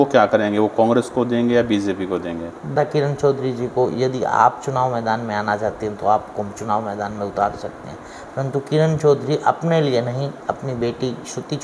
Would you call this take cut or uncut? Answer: cut